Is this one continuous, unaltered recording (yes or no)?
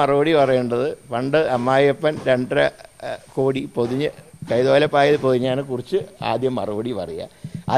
yes